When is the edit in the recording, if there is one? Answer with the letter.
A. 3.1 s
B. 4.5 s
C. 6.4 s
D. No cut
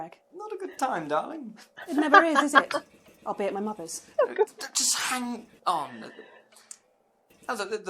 D